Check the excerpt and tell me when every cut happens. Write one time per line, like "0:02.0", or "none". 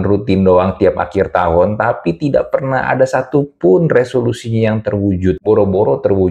0:05.4